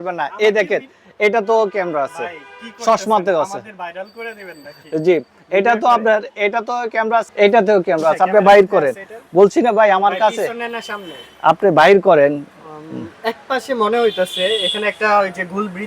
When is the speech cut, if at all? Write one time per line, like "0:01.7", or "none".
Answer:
0:07.3